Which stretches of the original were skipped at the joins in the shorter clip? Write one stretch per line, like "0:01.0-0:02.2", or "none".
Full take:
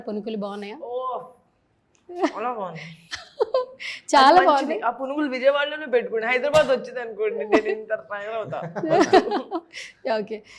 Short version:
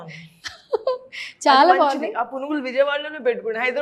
none